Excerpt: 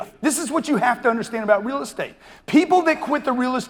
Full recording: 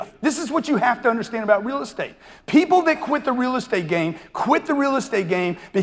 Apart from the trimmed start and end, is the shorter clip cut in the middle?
no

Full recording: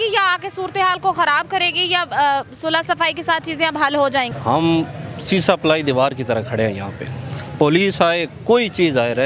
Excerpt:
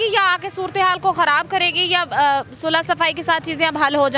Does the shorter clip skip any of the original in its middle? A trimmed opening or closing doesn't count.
no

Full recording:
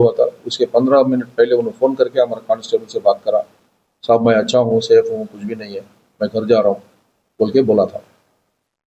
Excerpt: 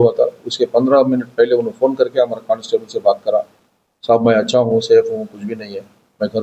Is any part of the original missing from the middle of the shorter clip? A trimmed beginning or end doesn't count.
no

